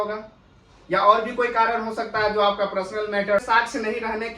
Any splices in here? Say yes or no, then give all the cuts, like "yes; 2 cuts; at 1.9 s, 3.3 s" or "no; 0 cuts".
yes; 1 cut; at 3.4 s